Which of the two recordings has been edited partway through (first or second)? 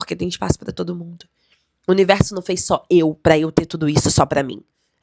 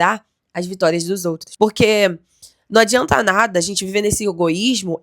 second